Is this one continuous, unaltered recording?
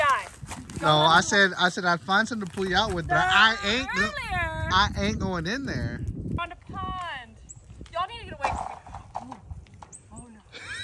no; 1 cut; at 6.4 s

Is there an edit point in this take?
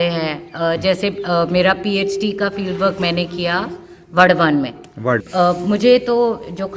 yes; 1 cut; at 5.3 s

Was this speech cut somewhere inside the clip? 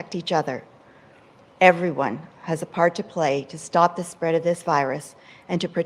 no; 0 cuts

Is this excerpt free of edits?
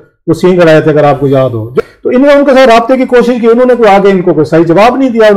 no; 1 cut; at 1.7 s

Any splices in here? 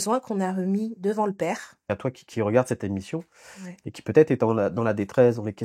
yes; 1 cut; at 1.9 s

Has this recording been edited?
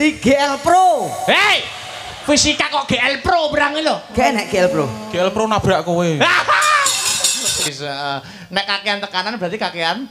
yes; 1 cut; at 7.7 s

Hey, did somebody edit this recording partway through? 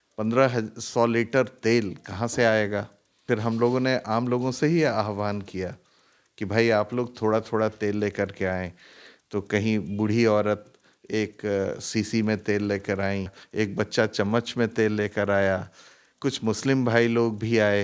yes; 2 cuts; at 3.1 s, 13.4 s

